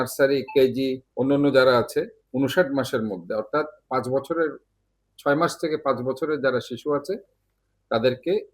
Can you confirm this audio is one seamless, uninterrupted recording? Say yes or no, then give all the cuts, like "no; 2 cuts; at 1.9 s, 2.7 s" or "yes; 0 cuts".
no; 2 cuts; at 1.0 s, 2.2 s